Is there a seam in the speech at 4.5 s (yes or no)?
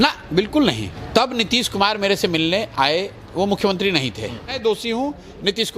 yes